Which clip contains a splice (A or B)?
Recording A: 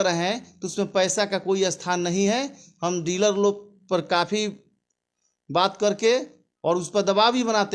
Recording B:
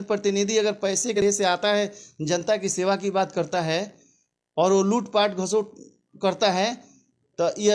B